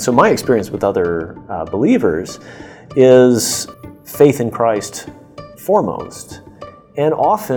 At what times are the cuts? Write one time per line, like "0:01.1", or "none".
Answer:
0:03.6